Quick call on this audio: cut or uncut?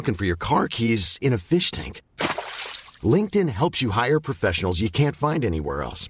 uncut